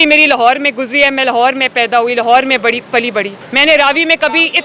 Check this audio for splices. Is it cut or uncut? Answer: cut